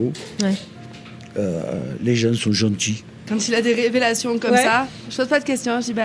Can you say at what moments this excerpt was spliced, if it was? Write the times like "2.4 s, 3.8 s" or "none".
3.2 s, 5.1 s